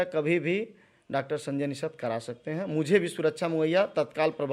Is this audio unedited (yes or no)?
yes